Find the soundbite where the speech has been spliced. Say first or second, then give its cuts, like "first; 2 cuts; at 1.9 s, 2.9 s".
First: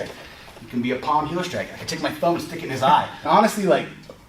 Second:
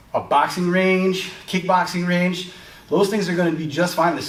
first; 1 cut; at 3.1 s